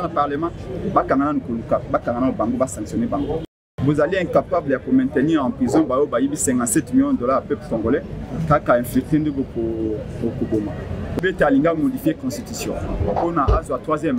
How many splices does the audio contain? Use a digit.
1